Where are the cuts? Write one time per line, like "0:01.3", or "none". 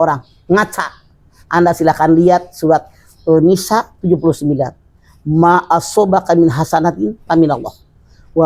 none